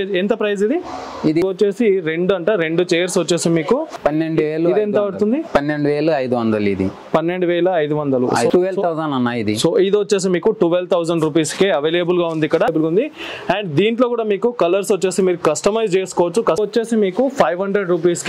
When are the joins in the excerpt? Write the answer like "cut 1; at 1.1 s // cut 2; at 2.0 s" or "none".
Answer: cut 1; at 1.4 s // cut 2; at 3.9 s // cut 3; at 8.5 s // cut 4; at 12.7 s // cut 5; at 16.6 s